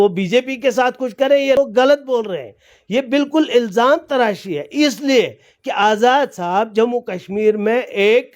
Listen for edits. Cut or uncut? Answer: cut